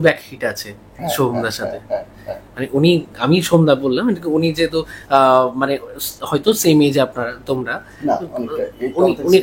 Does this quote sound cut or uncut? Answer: uncut